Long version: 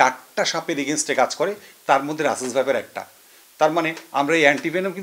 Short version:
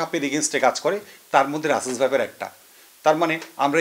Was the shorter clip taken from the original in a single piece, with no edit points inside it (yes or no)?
yes